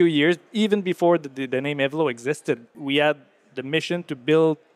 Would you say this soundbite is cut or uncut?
cut